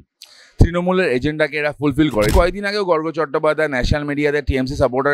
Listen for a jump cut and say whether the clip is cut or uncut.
cut